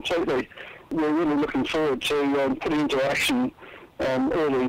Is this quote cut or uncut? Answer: cut